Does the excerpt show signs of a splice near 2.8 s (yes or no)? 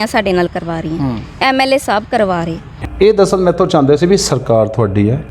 yes